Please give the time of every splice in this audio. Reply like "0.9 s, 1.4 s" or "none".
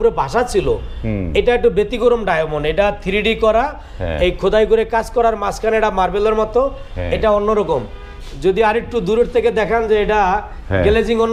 none